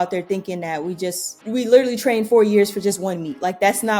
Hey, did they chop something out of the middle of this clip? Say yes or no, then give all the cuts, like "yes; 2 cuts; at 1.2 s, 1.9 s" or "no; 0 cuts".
yes; 1 cut; at 1.4 s